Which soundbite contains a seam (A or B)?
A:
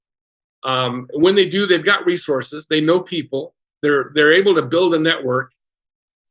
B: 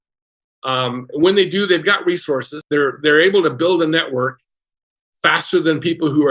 B